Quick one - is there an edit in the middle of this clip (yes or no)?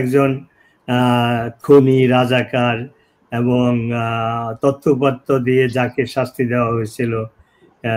no